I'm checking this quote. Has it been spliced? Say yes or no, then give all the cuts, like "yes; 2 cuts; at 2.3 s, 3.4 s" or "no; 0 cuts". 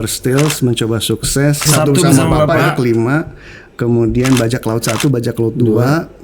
yes; 1 cut; at 1.6 s